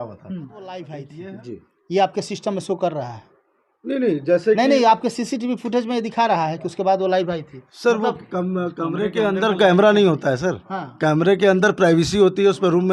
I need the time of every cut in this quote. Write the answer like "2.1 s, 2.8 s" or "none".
1.1 s